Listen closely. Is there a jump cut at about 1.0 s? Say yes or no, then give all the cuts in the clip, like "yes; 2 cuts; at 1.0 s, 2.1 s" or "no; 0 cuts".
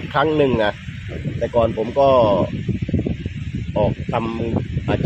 no; 0 cuts